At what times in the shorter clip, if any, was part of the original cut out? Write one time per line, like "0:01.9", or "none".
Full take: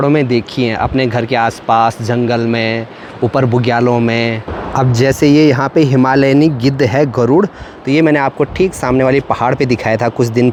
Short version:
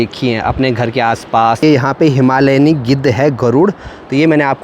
0:01.6